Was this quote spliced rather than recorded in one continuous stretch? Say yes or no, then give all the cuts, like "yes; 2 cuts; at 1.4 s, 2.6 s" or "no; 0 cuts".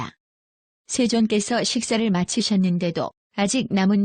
yes; 1 cut; at 1.5 s